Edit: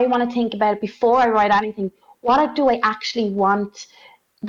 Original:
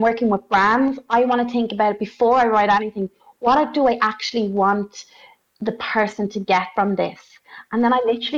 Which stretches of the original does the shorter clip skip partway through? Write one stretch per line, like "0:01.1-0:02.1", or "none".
none